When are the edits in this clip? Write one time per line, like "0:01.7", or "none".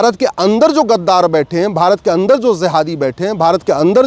none

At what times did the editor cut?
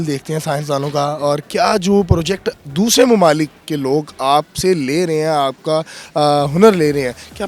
none

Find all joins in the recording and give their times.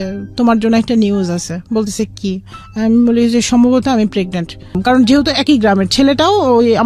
0:04.8

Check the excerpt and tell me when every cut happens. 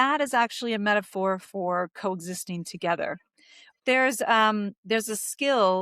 0:03.8

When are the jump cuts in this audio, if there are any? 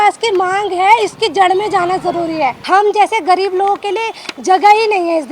0:02.6

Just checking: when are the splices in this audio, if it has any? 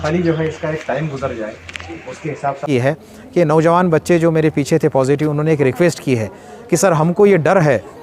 0:02.6

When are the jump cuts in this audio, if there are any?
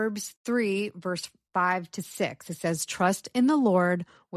none

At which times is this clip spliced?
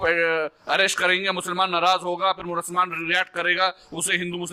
none

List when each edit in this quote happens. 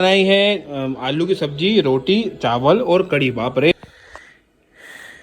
0:03.7

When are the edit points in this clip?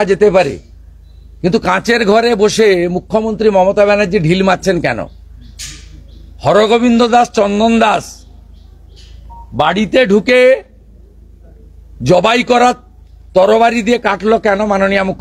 none

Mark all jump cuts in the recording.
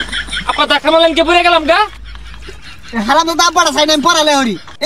0:02.3

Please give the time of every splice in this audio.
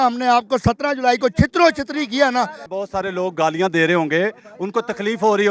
0:02.6

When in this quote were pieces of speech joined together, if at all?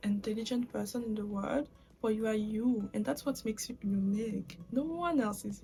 none

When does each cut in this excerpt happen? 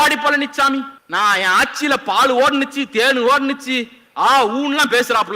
0:01.0

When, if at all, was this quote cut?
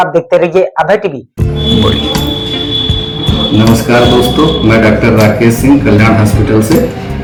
none

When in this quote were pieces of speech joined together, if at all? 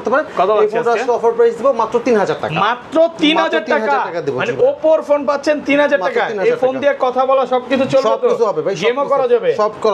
none

